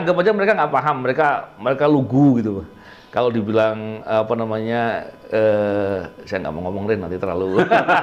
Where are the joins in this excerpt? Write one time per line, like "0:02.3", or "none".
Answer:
none